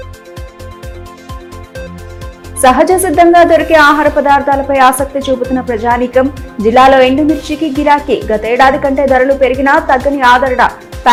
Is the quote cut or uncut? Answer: uncut